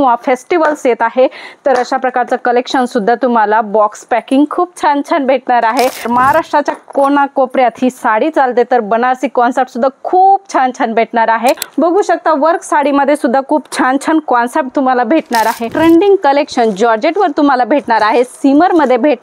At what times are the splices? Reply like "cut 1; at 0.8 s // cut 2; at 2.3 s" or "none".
cut 1; at 6.1 s // cut 2; at 11.7 s // cut 3; at 15.7 s